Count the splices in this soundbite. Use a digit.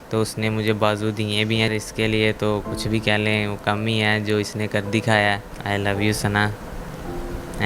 2